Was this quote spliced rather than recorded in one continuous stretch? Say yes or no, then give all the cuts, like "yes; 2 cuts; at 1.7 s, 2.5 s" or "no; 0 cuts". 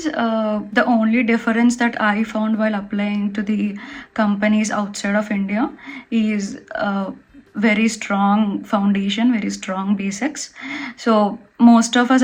no; 0 cuts